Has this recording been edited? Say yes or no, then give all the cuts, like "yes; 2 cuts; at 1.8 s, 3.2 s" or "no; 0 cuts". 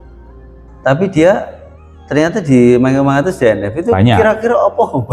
no; 0 cuts